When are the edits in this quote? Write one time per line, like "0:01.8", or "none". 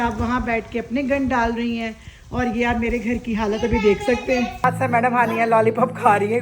0:04.6